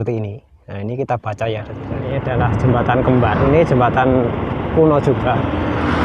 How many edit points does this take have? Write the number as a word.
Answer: one